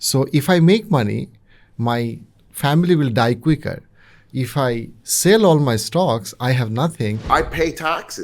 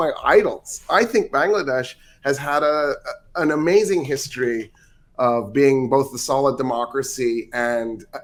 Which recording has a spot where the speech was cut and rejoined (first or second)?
first